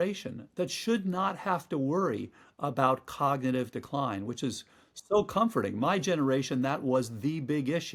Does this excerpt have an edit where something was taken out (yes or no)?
no